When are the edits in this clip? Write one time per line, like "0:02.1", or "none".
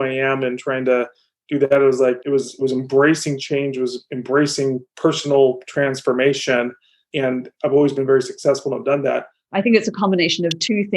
0:09.3